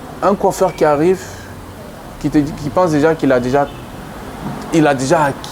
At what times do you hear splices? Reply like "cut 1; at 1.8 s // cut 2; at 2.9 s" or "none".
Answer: none